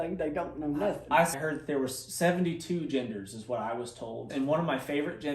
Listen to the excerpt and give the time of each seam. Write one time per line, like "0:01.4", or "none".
0:01.3
0:04.3

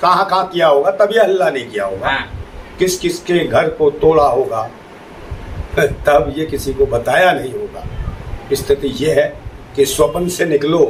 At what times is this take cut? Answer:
none

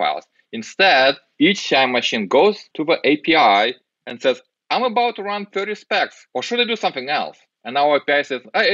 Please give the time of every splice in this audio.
0:01.3
0:02.7
0:06.2

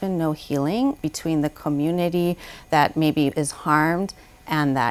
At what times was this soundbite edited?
0:01.0

